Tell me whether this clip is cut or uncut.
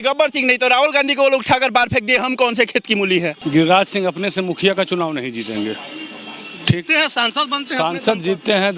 cut